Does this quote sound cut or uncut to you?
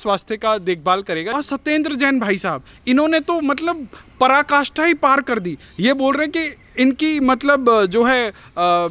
cut